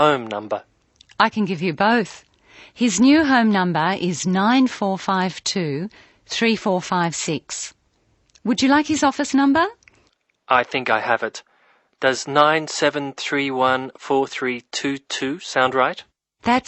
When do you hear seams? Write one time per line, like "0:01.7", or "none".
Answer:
none